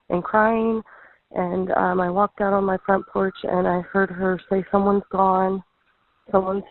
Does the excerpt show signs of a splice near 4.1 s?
no; 0 cuts

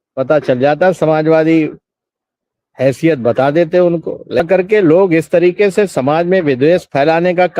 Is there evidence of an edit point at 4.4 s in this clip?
yes; 1 cut; at 4.4 s

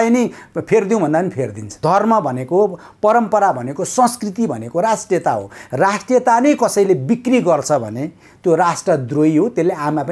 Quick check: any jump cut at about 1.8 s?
yes; 1 cut; at 1.8 s

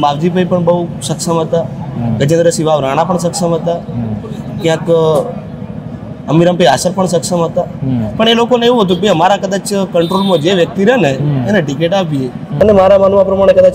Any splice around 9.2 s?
no; 1 cut; at 12.6 s

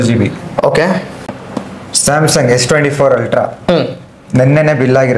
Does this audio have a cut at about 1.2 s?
yes; 1 cut; at 1.2 s

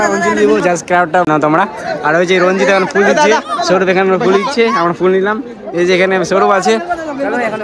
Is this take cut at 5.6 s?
no; 1 cut; at 0.9 s

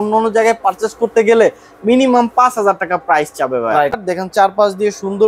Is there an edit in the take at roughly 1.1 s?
no; 1 cut; at 4.0 s

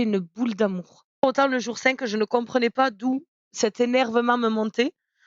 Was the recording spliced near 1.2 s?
yes; 1 cut; at 1.2 s

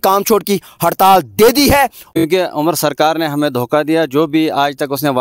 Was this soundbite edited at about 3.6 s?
no; 1 cut; at 2.0 s

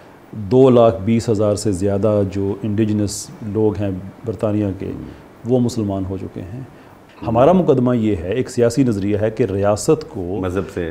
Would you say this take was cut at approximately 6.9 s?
yes; 1 cut; at 6.9 s

